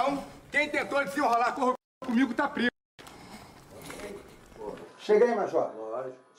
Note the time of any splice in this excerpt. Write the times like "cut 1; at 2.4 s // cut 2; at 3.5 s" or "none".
cut 1; at 4.0 s